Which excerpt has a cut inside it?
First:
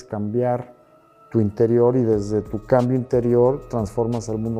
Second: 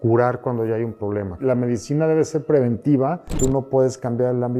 second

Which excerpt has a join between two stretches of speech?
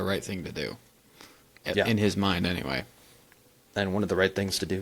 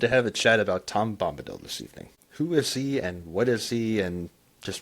second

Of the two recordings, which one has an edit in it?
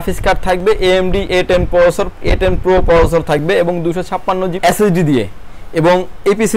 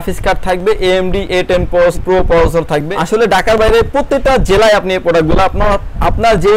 second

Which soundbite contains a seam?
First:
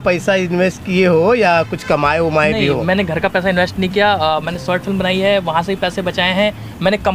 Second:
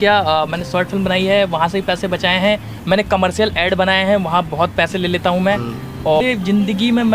second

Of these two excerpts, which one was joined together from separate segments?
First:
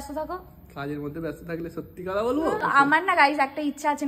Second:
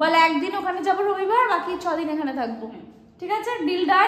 first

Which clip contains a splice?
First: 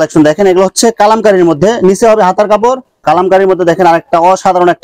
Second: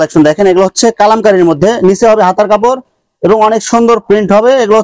first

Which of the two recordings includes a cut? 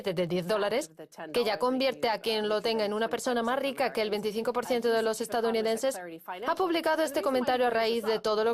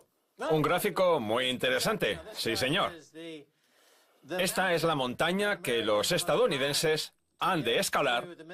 first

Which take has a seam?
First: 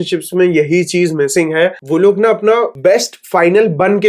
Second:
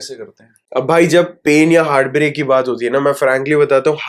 first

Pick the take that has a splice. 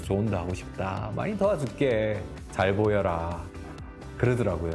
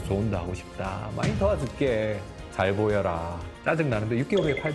second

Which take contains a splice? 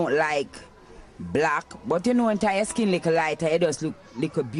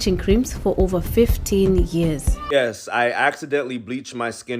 second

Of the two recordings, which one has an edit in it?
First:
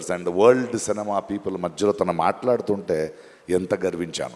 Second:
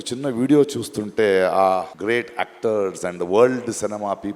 second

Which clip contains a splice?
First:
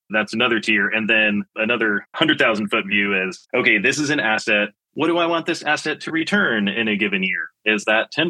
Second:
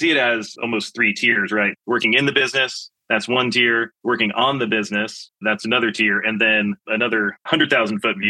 first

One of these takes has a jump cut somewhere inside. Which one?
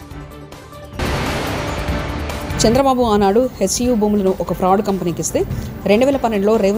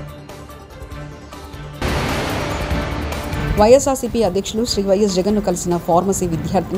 first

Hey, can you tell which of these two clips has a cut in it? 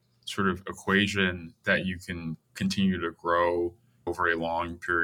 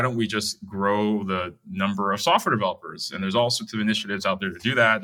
first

